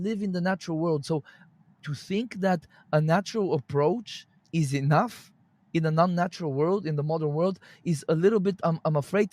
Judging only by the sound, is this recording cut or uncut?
cut